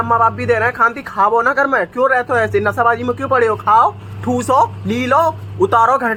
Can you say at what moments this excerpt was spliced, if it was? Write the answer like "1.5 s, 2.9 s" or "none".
none

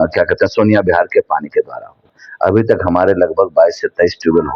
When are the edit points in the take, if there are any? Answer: 2.2 s

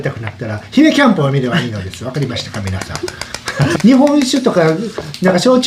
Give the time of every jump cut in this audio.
3.8 s

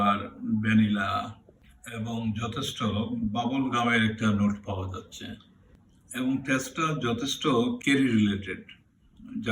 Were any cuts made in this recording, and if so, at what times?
none

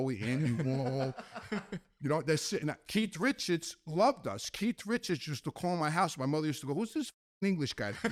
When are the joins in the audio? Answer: none

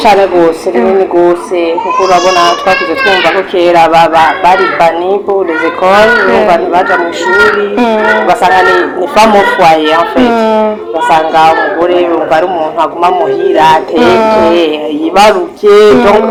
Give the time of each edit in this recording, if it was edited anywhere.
none

